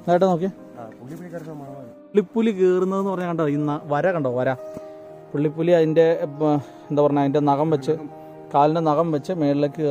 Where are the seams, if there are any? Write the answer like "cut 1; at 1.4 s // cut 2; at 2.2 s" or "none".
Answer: cut 1; at 2.1 s